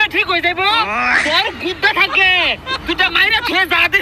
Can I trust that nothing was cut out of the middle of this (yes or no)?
yes